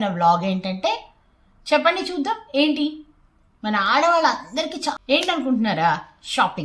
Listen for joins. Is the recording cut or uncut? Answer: cut